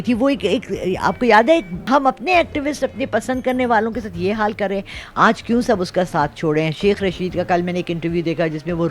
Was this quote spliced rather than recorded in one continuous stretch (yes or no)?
no